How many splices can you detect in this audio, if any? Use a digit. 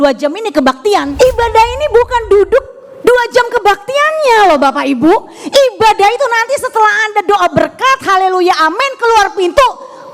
1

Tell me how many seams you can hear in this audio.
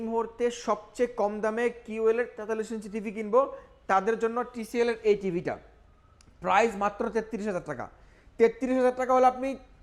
0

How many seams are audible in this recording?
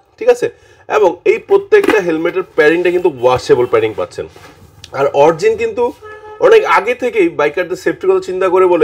0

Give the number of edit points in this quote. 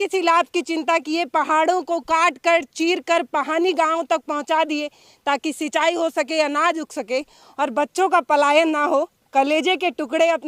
0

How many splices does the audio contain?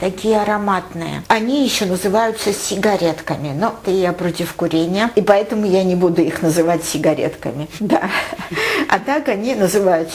3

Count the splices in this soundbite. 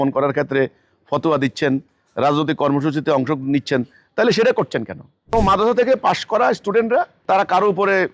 2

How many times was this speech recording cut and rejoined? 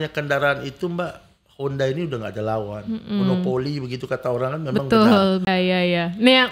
1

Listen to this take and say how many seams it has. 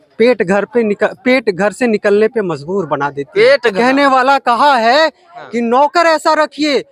1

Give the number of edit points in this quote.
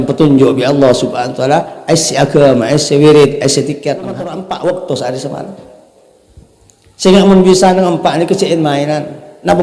1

